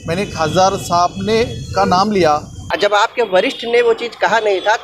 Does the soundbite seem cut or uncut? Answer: cut